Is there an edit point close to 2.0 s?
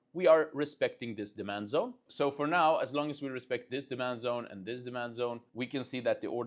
yes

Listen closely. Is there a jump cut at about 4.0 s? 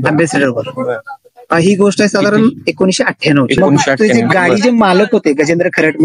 yes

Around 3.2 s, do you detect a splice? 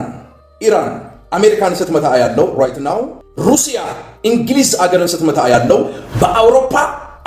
yes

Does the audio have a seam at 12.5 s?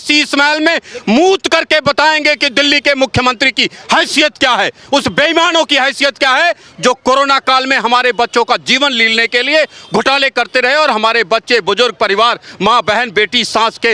no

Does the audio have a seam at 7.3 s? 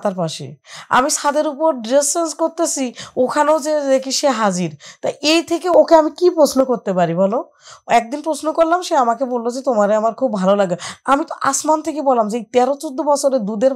no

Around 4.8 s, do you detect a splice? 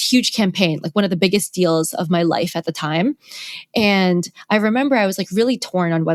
no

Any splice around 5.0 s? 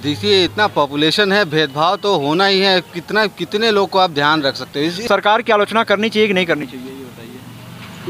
yes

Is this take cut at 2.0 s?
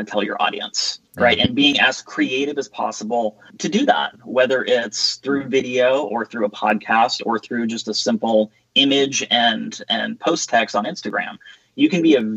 no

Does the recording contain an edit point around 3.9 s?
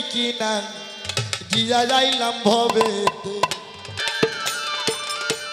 yes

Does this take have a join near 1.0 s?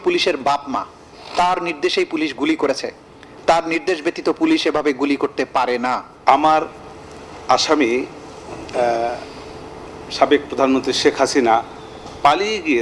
no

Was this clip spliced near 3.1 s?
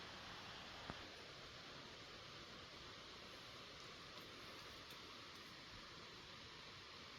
no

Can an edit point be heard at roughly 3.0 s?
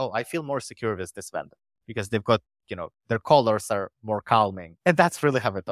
no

